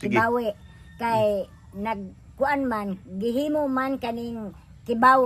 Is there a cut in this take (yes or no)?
no